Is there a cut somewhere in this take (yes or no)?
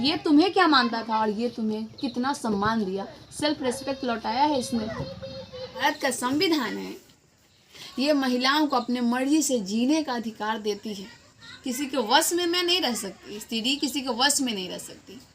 yes